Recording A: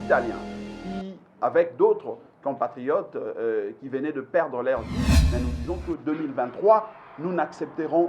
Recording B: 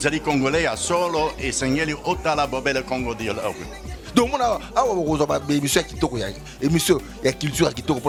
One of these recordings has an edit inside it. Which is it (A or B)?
A